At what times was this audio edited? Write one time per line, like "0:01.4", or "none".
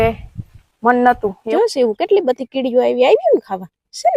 0:01.4